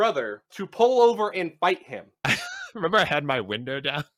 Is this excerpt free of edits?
no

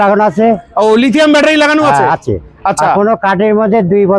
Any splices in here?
no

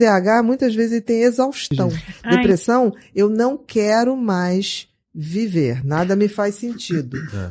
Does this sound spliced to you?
yes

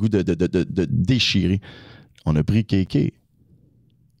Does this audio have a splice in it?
no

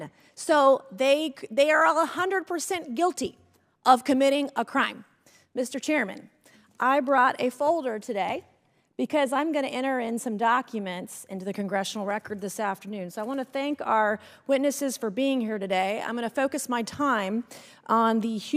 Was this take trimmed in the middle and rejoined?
no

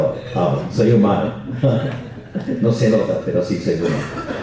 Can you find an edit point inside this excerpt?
no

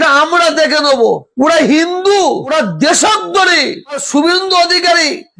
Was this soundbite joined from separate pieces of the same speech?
no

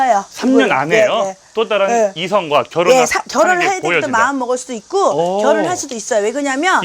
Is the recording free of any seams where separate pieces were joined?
yes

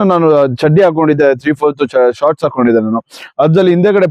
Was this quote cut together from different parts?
no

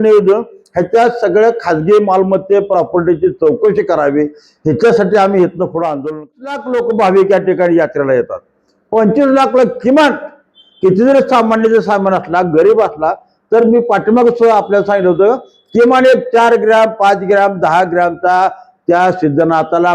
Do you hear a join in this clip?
yes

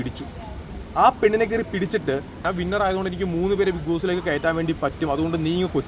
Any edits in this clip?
yes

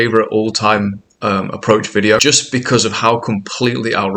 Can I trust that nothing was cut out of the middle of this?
no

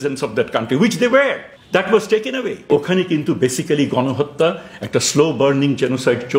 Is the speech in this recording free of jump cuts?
no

